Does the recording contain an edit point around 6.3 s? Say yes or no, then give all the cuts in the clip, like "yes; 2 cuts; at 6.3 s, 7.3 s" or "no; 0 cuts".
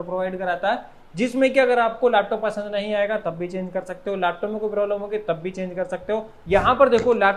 yes; 1 cut; at 6.3 s